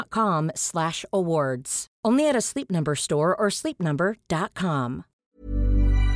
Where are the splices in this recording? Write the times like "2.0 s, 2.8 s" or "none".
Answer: 5.1 s

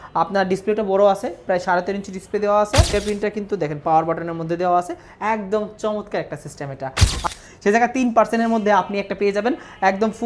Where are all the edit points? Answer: 2.9 s, 7.2 s

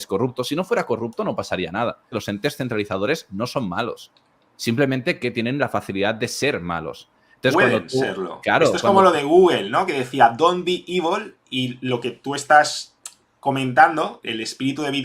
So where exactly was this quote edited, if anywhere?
2.1 s

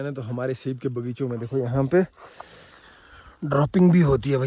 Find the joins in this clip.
none

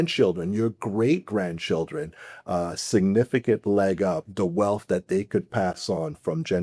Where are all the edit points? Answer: 4.3 s

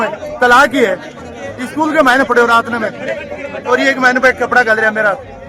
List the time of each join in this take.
none

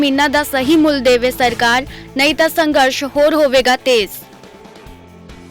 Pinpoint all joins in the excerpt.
none

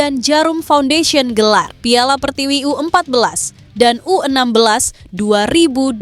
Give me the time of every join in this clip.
none

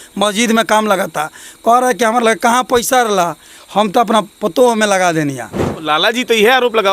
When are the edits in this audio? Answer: 5.9 s

